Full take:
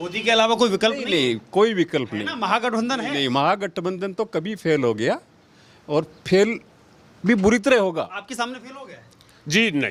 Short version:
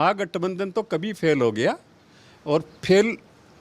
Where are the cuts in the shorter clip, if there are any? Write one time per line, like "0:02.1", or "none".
none

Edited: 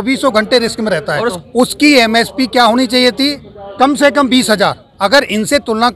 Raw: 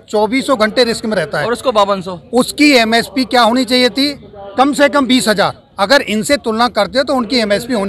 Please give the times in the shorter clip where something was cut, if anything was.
0:01.3

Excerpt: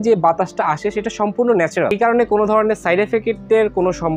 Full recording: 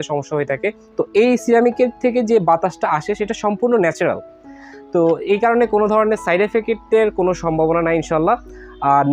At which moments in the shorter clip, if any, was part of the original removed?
0:01.9

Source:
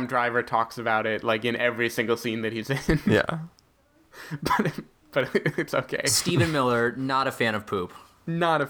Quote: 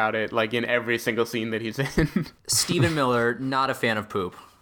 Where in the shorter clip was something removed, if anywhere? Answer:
0:02.2

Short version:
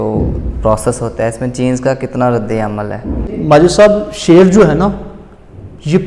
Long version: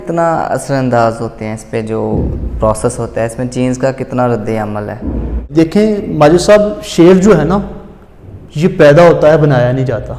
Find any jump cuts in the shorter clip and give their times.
0:03.3

